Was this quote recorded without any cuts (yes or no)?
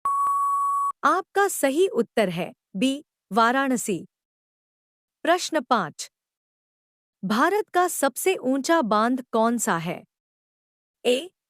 no